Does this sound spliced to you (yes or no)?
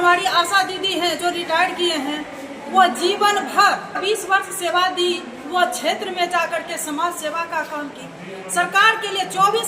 yes